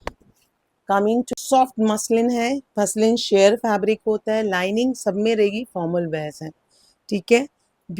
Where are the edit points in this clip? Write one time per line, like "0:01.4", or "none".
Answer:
0:01.3